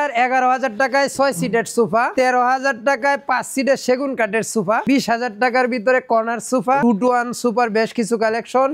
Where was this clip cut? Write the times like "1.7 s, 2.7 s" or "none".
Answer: 2.1 s, 4.8 s, 6.8 s

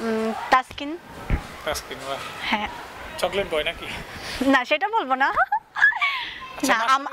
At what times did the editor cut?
none

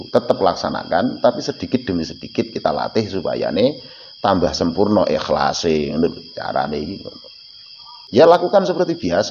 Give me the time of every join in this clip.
7.9 s

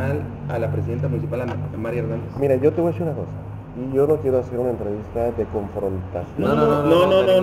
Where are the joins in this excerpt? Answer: none

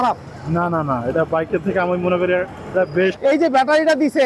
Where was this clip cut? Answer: 3.2 s

